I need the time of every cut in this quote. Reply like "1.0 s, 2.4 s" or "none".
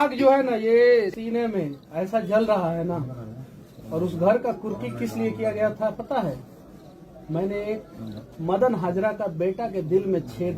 1.2 s